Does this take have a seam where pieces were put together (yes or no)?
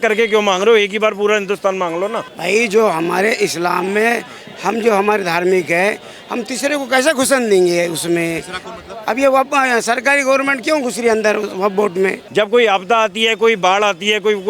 yes